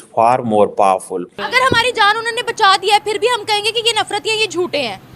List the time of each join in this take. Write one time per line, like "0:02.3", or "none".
0:01.4